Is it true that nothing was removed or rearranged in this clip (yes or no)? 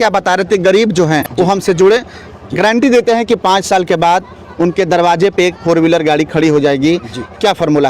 no